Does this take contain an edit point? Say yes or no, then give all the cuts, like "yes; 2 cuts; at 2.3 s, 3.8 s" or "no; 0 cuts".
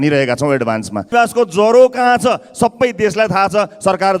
yes; 1 cut; at 1.1 s